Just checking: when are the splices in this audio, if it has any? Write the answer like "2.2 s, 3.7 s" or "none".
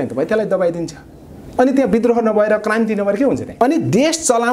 3.5 s